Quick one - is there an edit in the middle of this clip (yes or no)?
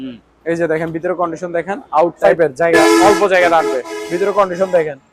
yes